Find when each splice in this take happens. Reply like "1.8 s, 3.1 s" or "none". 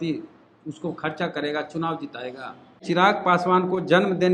2.8 s